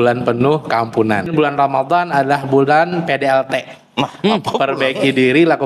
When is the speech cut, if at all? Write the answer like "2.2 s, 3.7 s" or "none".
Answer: 1.3 s